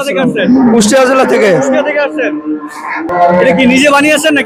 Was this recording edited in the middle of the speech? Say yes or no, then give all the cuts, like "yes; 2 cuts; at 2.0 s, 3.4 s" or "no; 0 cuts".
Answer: no; 0 cuts